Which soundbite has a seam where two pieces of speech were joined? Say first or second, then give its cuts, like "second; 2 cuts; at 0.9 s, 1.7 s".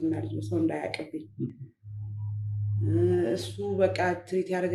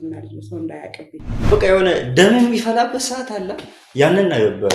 second; 1 cut; at 1.4 s